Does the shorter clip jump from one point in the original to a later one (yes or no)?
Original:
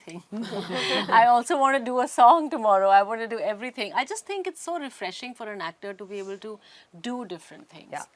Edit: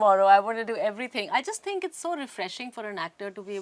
no